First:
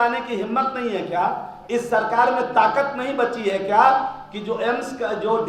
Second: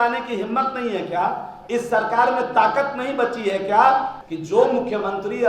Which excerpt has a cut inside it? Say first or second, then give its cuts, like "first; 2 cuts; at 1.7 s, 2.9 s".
second; 1 cut; at 4.2 s